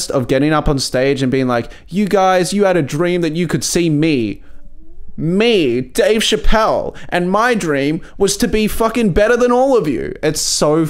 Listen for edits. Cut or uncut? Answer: uncut